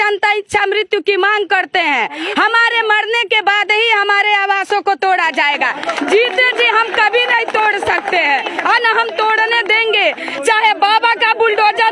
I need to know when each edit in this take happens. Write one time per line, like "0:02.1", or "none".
none